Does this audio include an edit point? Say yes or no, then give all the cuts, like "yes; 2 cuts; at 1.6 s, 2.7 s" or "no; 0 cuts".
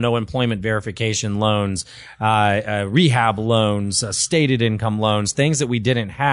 no; 0 cuts